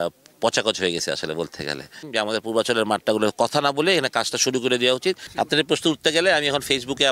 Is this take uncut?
no; 2 cuts; at 2.1 s, 5.2 s

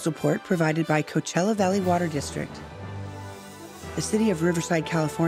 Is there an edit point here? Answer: yes; 2 cuts; at 2.5 s, 4.0 s

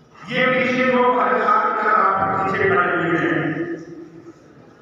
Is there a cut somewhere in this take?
no; 0 cuts

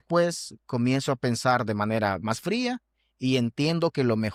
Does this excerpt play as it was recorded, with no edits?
yes; 0 cuts

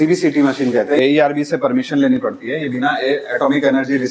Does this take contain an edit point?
yes; 1 cut; at 1.0 s

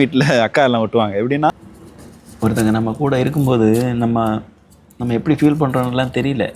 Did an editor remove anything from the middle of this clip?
yes; 1 cut; at 1.5 s

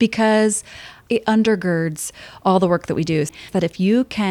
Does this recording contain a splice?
yes; 2 cuts; at 0.9 s, 3.3 s

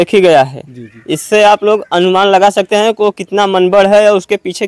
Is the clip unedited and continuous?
yes; 0 cuts

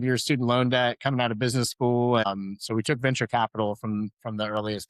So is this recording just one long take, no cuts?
no; 1 cut; at 2.2 s

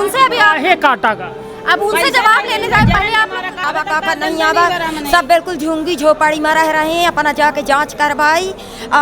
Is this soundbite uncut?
no; 1 cut; at 3.7 s

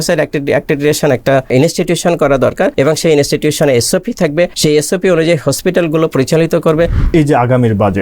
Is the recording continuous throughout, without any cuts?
no; 4 cuts; at 1.5 s, 2.7 s, 4.5 s, 7.0 s

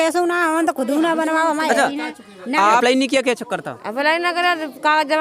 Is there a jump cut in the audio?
yes; 1 cut; at 2.8 s

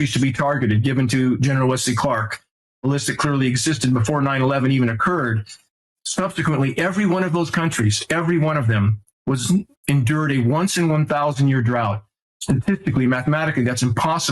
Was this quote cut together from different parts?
no; 0 cuts

